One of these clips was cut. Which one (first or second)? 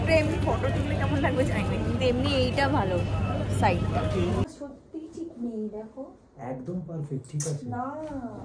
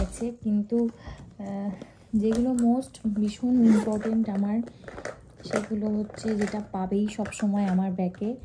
first